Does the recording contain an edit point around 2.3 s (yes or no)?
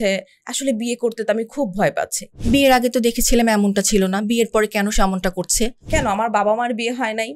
yes